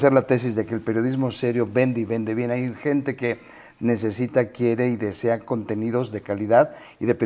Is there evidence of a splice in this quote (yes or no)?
no